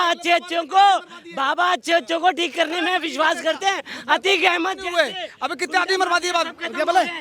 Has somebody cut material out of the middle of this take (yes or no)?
no